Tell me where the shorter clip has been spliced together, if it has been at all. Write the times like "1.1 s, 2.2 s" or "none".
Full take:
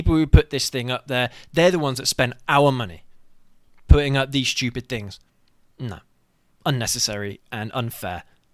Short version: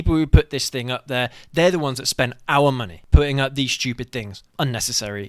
2.9 s, 4.4 s